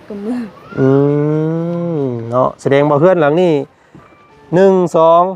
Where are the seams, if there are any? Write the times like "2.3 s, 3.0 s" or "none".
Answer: none